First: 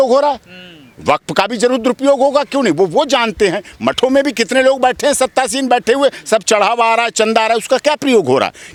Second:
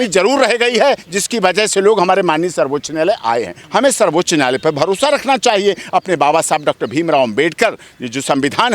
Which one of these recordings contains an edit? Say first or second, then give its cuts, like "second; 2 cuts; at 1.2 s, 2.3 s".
second; 1 cut; at 3.6 s